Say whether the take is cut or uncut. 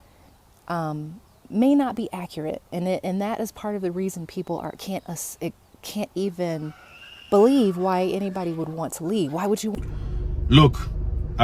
cut